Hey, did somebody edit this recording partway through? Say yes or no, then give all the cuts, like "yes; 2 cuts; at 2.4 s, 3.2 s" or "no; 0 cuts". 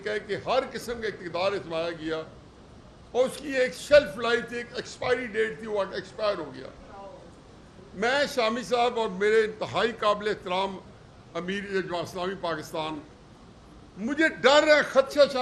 no; 0 cuts